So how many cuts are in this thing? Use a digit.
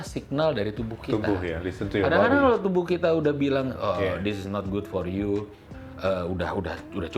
1